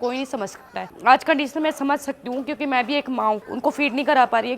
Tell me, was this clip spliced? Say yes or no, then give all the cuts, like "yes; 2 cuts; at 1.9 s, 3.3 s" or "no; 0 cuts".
yes; 2 cuts; at 0.9 s, 3.4 s